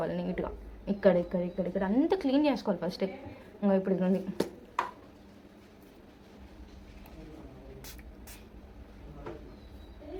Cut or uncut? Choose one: uncut